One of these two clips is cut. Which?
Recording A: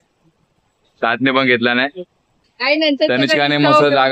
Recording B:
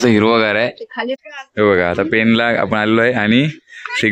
B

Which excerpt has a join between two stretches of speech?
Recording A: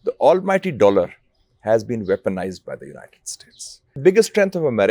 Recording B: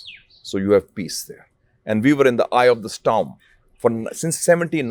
A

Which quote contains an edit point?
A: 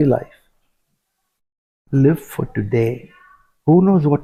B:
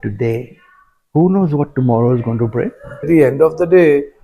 B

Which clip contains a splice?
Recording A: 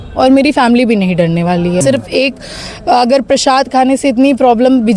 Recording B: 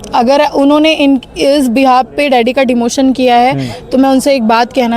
A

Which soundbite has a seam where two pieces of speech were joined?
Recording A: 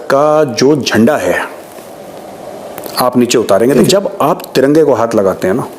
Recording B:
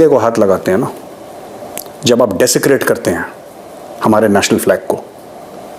A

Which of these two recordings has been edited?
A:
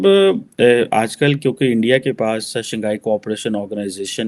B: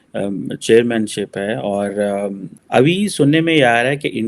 B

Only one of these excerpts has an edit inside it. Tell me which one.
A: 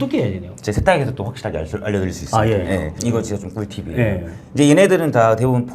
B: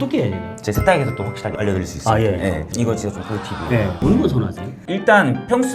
B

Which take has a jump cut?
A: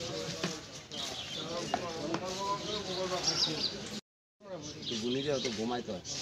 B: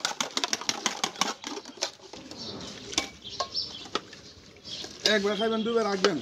B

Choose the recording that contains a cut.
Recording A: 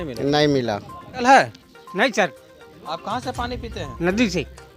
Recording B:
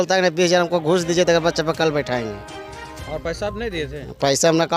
A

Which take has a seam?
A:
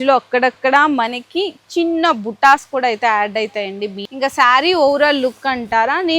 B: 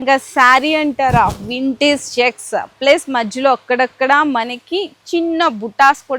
A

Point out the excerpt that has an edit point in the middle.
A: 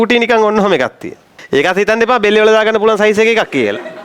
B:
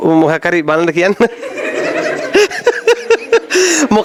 A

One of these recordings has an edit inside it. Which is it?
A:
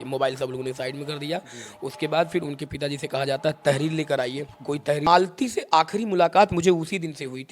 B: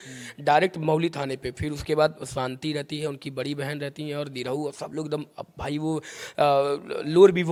A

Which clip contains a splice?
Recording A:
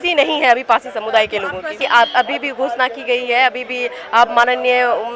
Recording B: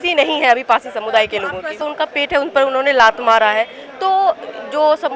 B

